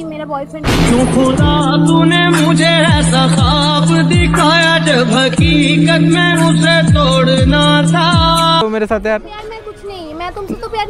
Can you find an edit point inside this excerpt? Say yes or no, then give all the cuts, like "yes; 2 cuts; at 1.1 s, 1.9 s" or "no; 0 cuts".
yes; 1 cut; at 8.6 s